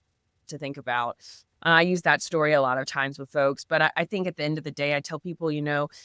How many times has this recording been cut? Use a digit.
0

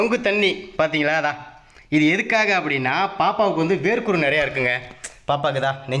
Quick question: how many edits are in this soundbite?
0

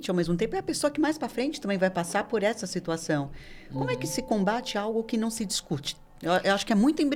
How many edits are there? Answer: 0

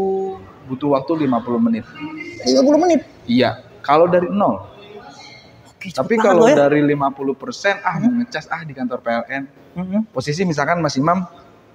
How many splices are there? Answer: 0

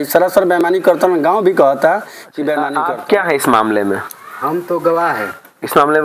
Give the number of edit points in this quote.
1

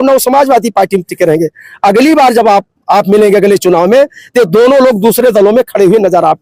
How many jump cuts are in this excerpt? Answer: 0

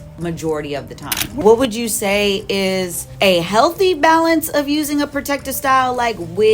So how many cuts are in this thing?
2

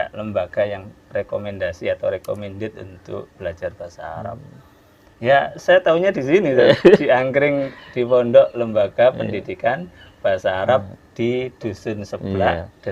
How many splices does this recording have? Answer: 0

